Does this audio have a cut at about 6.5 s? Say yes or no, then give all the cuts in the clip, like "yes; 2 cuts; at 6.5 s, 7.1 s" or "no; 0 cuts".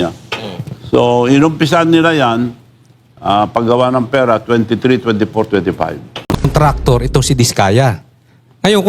yes; 1 cut; at 6.5 s